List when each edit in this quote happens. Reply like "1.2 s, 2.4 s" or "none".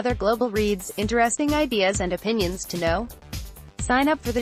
none